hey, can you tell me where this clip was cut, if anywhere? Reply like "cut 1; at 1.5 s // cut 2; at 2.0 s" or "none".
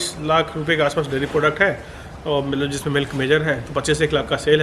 none